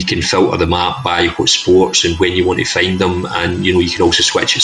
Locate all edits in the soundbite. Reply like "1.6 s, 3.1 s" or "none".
none